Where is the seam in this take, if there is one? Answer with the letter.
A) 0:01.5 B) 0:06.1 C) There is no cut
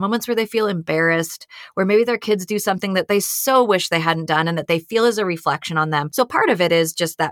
B